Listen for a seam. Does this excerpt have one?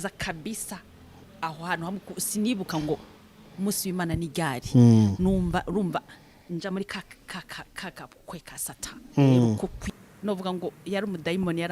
yes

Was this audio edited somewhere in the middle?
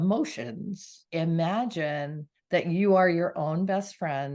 yes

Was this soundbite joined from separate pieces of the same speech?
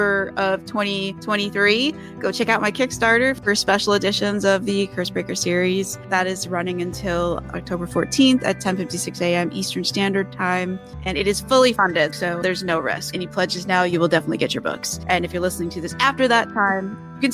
yes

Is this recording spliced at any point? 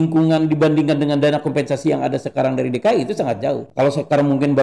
yes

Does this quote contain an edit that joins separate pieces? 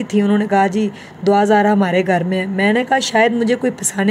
no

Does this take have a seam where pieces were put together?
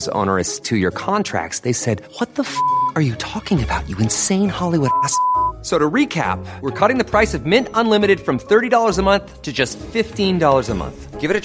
no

